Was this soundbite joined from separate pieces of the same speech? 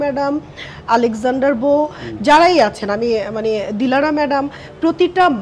no; 0 cuts

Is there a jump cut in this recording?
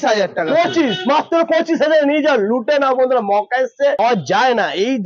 yes; 1 cut; at 4.0 s

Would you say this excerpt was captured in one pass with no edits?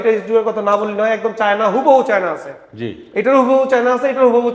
yes; 0 cuts

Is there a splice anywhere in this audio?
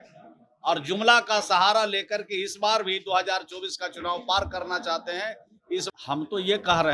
yes; 1 cut; at 5.9 s

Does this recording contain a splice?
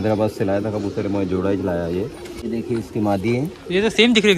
no; 0 cuts

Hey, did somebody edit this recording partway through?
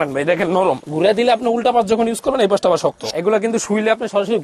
yes; 2 cuts; at 0.9 s, 3.0 s

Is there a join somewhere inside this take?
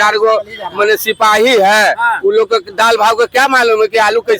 no; 0 cuts

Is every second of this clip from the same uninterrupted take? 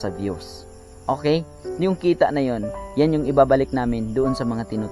no; 1 cut; at 1.6 s

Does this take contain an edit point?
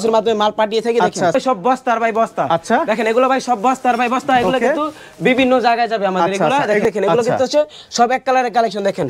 yes; 2 cuts; at 1.3 s, 6.8 s

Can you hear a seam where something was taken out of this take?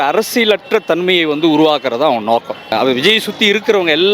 yes; 1 cut; at 2.7 s

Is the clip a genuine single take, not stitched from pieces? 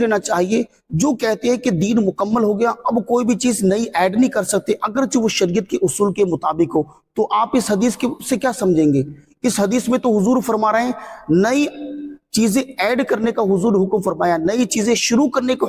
yes; 0 cuts

